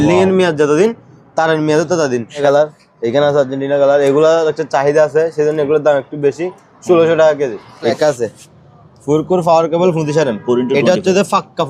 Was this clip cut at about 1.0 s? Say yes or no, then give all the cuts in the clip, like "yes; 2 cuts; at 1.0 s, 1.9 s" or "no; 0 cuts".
no; 2 cuts; at 2.4 s, 7.9 s